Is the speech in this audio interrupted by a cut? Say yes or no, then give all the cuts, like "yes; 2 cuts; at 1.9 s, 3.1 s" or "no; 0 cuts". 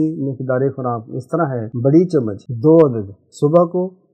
yes; 2 cuts; at 1.7 s, 2.4 s